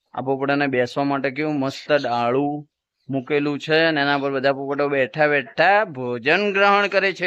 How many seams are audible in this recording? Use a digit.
0